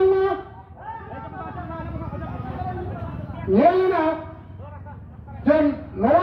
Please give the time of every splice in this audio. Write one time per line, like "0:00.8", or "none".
none